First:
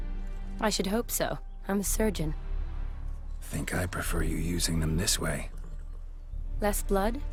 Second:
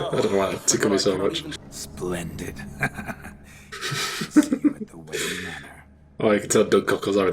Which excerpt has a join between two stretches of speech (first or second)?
second